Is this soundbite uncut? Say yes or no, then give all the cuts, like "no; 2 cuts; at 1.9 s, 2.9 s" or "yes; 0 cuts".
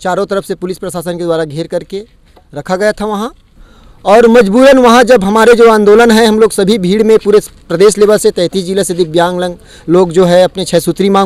yes; 0 cuts